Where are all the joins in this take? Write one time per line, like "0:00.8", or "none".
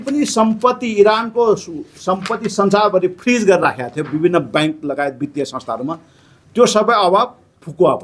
none